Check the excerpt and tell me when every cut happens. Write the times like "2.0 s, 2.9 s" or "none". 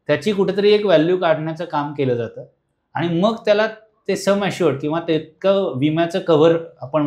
none